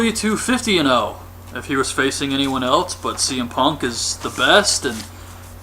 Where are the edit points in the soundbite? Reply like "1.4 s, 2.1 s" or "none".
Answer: 2.1 s